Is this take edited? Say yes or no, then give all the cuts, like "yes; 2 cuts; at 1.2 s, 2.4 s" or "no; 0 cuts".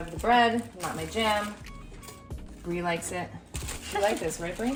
no; 0 cuts